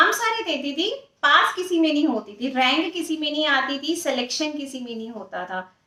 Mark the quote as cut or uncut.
uncut